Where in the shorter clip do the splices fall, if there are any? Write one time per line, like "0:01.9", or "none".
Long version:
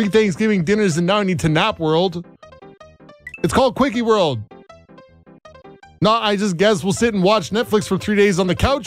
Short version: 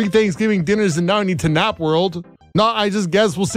0:02.3